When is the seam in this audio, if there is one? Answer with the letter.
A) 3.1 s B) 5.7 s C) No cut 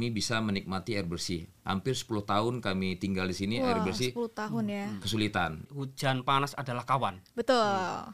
B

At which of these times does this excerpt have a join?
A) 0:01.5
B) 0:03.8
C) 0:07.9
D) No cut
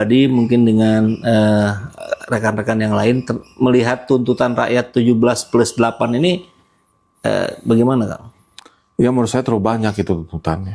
D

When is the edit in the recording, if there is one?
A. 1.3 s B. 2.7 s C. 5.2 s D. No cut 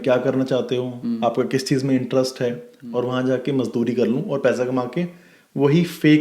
B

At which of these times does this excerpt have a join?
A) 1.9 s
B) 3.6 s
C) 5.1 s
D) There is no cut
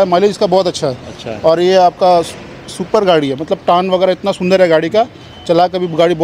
D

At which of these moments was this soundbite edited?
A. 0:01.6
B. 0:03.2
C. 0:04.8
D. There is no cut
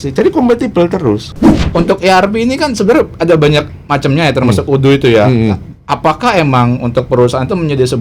A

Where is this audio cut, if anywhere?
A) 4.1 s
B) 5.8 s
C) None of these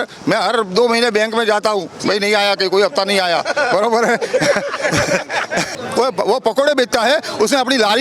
B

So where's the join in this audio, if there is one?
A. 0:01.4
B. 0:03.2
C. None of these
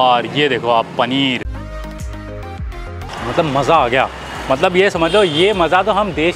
A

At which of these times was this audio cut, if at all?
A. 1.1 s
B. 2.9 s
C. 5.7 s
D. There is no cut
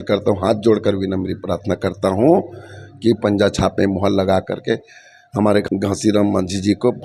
C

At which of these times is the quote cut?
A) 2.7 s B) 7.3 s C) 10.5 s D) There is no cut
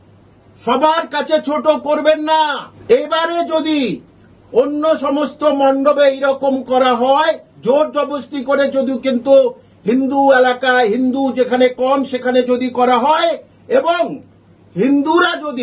A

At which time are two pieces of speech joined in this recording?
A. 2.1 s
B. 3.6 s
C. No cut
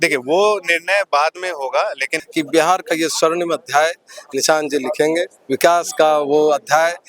A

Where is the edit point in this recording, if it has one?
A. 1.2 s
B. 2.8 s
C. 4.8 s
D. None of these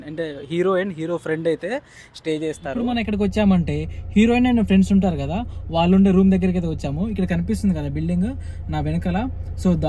B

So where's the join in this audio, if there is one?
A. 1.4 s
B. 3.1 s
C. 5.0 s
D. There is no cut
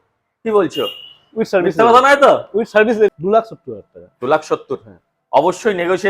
B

